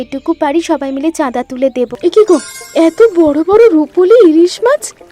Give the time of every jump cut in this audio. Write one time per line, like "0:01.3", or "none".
0:01.9